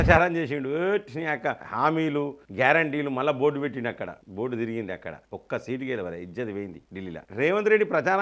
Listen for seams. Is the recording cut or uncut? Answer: cut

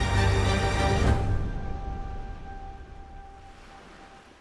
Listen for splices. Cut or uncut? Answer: uncut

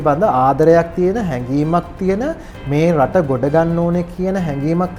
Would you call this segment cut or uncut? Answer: uncut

